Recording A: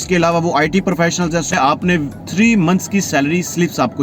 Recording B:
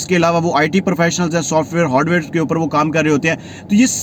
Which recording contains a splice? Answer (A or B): A